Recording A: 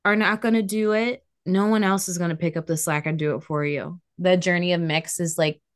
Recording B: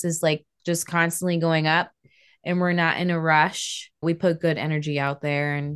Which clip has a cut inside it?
A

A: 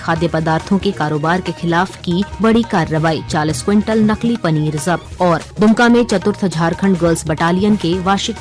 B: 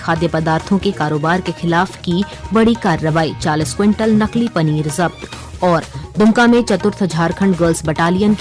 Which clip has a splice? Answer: A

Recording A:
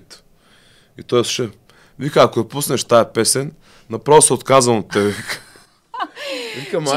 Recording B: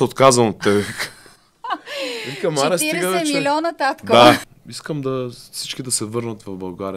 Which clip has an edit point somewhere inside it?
B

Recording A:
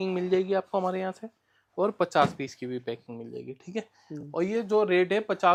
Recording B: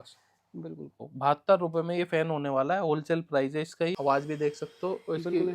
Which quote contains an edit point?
B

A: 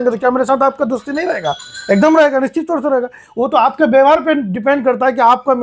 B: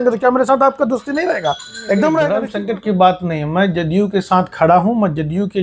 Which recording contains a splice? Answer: B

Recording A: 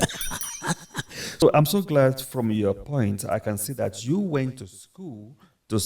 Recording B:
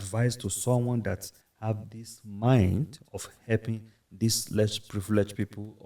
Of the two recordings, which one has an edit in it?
A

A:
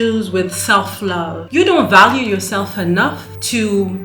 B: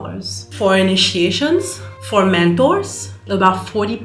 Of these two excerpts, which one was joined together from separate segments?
B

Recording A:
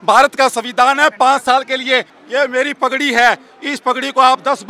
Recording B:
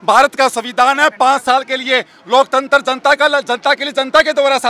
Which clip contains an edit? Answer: A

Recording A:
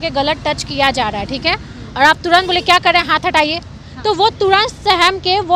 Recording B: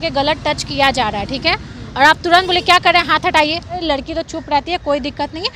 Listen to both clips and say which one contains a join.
B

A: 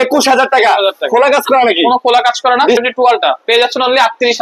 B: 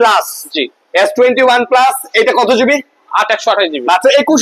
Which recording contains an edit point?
A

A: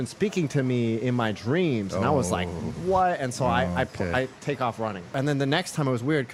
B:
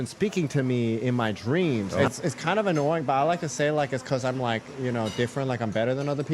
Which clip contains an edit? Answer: B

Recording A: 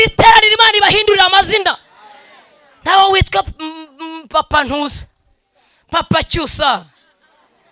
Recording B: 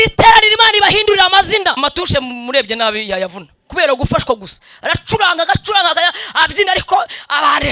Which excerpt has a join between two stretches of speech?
B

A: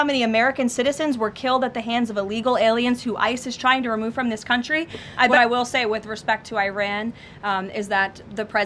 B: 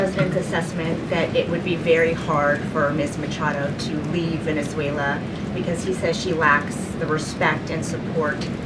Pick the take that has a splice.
A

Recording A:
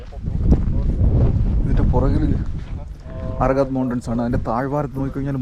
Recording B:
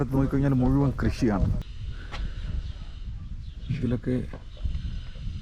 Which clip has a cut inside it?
B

